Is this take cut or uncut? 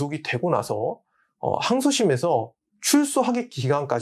uncut